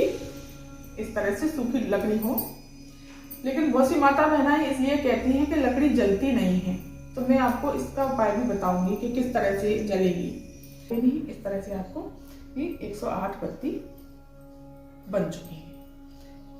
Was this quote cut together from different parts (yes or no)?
yes